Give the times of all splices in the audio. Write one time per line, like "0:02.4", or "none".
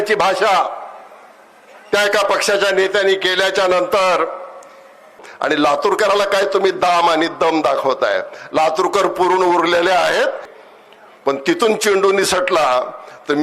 0:05.2
0:10.5